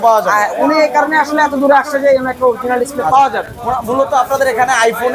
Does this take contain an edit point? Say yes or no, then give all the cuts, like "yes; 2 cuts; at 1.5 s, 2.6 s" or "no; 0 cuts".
no; 0 cuts